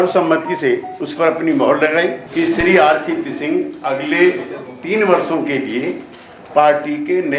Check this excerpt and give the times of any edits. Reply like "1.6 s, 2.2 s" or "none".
2.2 s